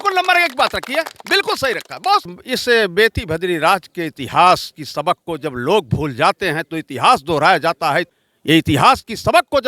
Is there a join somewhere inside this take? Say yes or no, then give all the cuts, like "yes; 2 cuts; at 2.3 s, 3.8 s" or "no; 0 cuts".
yes; 2 cuts; at 2.4 s, 8.1 s